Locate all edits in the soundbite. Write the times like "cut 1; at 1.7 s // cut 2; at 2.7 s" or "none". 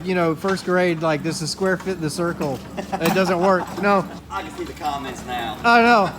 none